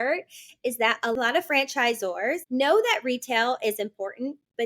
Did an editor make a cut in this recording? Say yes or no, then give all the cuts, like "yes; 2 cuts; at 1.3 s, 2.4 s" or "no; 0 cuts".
yes; 2 cuts; at 1.1 s, 2.4 s